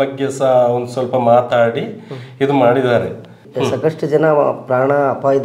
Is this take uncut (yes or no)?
no